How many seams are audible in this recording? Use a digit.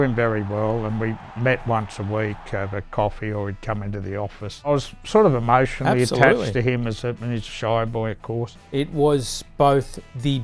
2